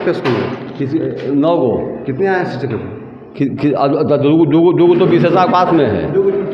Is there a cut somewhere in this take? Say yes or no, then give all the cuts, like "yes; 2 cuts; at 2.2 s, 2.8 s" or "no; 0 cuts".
no; 0 cuts